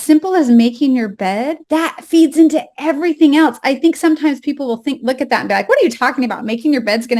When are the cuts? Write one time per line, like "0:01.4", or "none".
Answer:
0:01.6